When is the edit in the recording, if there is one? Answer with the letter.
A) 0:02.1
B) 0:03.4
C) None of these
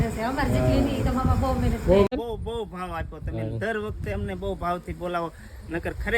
A